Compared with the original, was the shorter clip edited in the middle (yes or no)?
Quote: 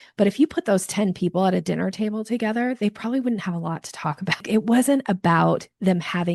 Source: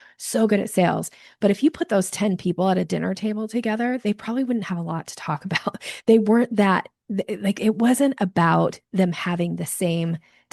yes